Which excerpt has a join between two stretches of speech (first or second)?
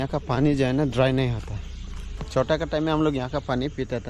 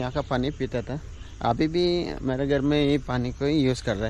first